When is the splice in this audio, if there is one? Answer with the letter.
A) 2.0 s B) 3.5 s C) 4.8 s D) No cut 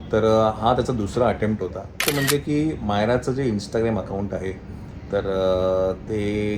A